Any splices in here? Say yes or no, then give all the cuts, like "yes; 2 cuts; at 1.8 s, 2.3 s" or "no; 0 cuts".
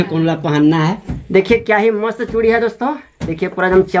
yes; 1 cut; at 1.1 s